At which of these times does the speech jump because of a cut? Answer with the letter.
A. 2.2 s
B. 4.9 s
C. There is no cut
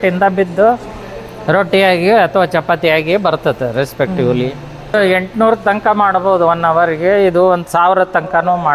B